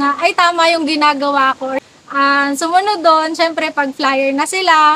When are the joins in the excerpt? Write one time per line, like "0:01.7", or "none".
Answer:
0:01.8